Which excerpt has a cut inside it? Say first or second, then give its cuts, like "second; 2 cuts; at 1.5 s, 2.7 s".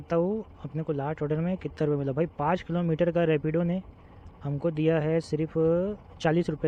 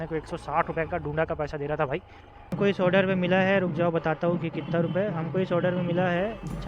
second; 1 cut; at 2.6 s